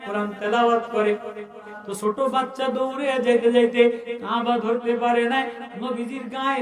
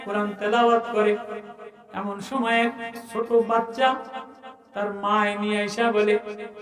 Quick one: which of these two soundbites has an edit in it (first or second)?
first